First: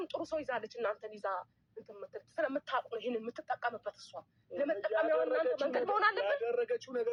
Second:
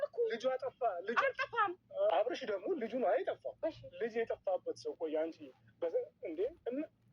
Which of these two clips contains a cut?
second; 1 cut; at 2.1 s

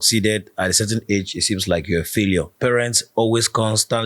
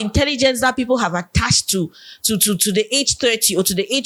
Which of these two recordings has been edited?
first; 1 cut; at 2.5 s

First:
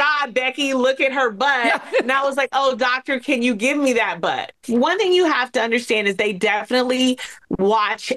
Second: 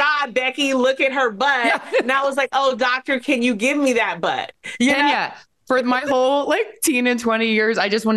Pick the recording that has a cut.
first; 1 cut; at 4.6 s

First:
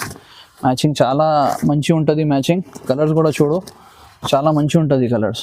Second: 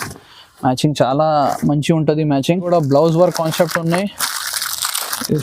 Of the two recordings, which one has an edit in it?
second; 1 cut; at 2.7 s

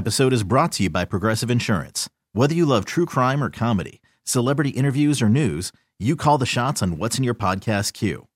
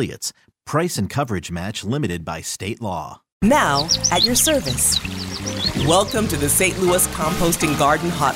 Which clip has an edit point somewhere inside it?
second; 1 cut; at 3.3 s

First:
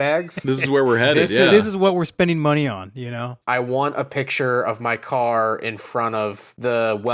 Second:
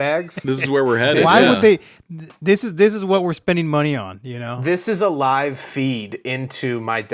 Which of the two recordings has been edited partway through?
first; 2 cuts; at 1.3 s, 3.3 s

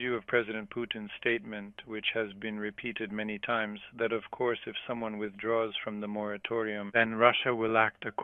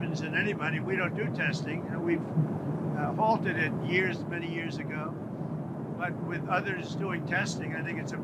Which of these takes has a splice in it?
first; 1 cut; at 6.9 s

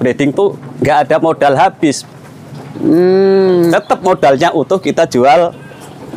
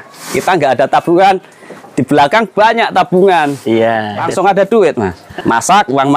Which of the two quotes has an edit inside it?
second; 2 cuts; at 4.2 s, 5.2 s

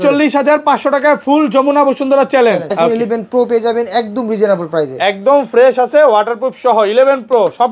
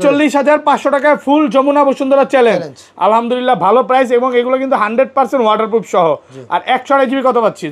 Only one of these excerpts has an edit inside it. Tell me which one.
first; 1 cut; at 2.7 s

